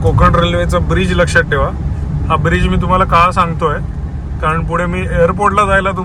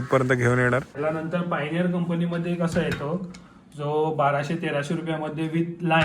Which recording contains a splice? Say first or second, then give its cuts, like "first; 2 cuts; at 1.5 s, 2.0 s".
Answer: second; 1 cut; at 0.9 s